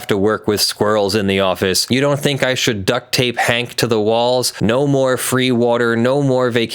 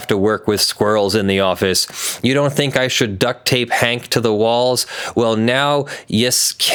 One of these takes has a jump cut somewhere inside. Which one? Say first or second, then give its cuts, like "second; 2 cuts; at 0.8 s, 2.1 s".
first; 2 cuts; at 1.8 s, 4.5 s